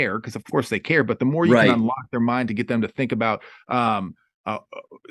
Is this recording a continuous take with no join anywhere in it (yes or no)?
yes